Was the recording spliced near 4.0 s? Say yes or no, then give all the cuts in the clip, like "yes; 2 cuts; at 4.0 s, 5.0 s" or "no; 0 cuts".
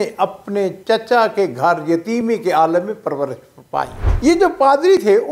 yes; 1 cut; at 4.0 s